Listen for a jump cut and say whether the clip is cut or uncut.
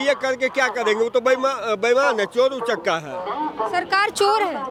uncut